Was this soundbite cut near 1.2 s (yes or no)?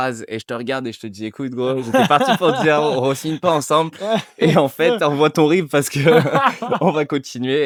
no